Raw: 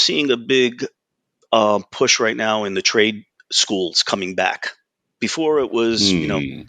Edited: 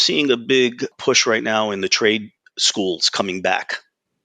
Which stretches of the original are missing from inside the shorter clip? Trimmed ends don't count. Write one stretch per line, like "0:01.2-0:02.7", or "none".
0:01.0-0:01.9